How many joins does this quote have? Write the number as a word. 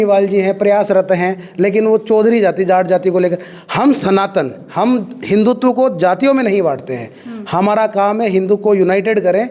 zero